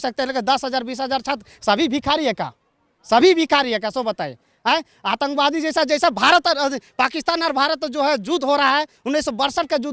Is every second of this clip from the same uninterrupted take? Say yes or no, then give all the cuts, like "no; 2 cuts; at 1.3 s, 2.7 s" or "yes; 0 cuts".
yes; 0 cuts